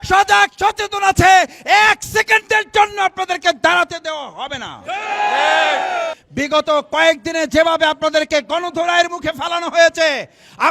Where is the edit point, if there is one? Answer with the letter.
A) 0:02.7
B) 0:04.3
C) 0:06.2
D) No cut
C